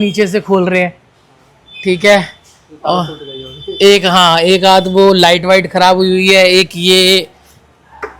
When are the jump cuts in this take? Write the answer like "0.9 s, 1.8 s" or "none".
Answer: none